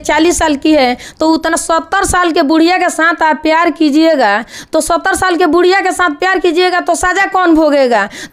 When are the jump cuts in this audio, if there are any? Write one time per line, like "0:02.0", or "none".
none